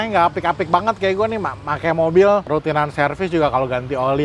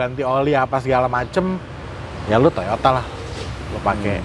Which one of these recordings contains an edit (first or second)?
first